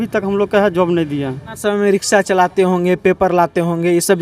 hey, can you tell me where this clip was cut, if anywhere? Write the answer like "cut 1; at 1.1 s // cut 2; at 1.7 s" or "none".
cut 1; at 1.5 s